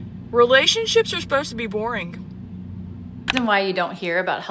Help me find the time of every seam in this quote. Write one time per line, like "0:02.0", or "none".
0:03.2

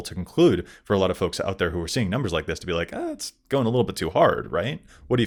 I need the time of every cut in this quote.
none

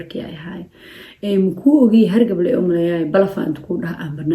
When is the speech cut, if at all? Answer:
none

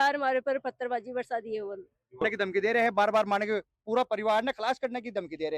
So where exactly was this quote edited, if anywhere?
0:02.2

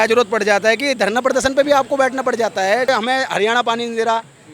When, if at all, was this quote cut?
0:02.9

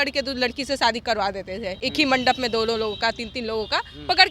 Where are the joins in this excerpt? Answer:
none

